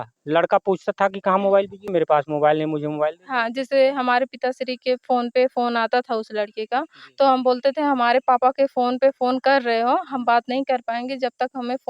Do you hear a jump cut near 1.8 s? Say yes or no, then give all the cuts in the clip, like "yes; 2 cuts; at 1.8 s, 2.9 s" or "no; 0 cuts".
yes; 1 cut; at 1.8 s